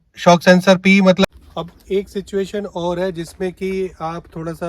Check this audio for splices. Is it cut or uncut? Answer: cut